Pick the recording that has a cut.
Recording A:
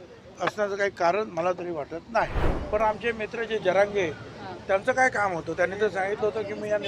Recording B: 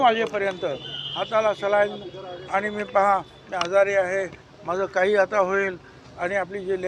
A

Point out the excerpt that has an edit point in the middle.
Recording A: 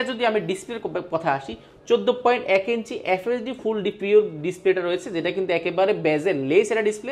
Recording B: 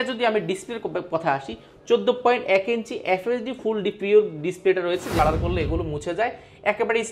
B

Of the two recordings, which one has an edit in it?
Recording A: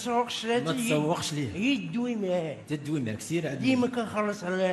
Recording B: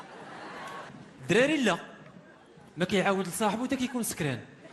B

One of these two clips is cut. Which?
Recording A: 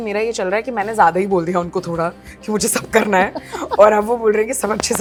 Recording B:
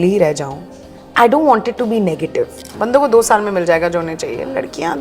B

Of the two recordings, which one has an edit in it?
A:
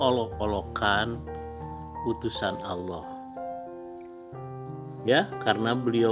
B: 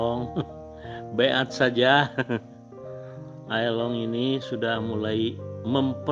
A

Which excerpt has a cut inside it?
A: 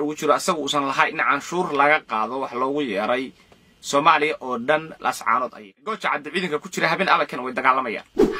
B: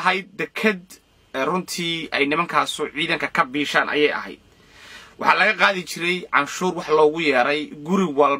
A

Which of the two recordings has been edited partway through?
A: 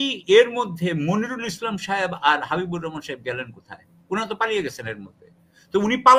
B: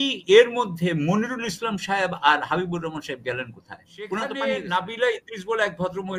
B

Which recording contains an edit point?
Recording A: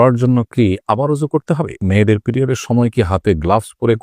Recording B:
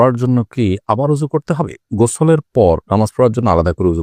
A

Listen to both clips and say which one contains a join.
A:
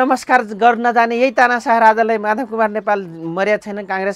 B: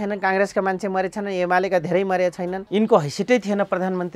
B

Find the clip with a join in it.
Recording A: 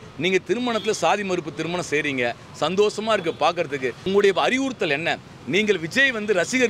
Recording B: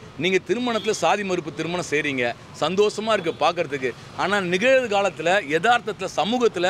A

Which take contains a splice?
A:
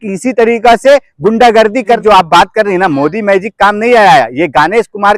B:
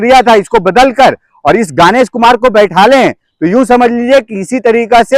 A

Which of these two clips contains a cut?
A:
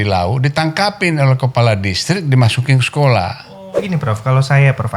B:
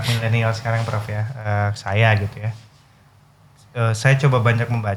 A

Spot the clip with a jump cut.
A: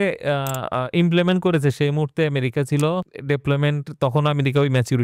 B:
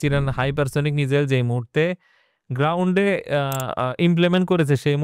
A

